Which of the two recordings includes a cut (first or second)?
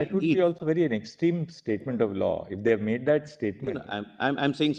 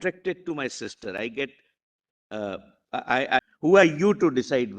second